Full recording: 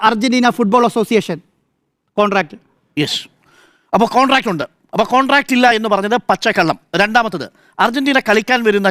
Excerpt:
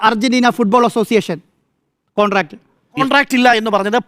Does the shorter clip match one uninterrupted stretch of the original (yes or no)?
no